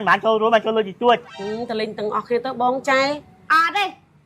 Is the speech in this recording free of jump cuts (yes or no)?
yes